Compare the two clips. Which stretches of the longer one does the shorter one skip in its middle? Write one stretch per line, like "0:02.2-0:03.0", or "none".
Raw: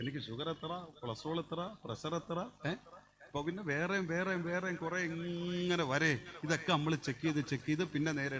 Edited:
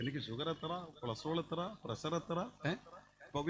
none

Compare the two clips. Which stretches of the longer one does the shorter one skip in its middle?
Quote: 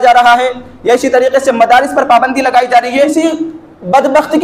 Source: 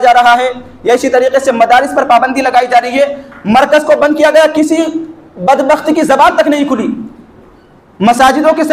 0:03.1-0:04.7

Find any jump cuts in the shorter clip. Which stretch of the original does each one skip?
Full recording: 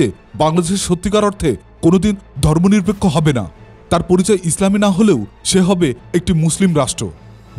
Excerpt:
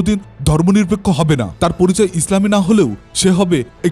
0:03.5-0:03.8

